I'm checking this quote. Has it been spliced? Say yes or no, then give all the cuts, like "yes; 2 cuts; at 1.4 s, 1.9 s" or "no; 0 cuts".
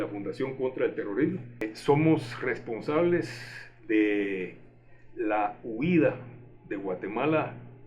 yes; 1 cut; at 1.7 s